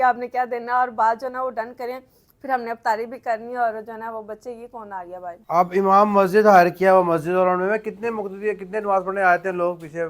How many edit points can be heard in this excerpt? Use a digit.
1